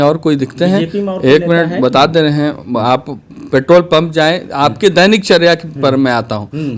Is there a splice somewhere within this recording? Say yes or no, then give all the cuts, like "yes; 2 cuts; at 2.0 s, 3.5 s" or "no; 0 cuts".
no; 0 cuts